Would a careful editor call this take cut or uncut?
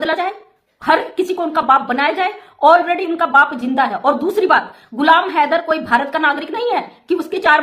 uncut